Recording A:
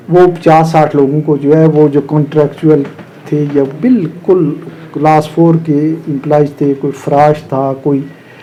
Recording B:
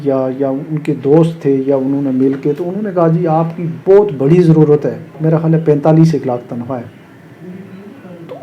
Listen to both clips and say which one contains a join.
B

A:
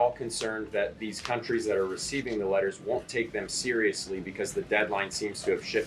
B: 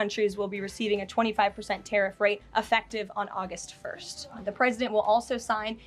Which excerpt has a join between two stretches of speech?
B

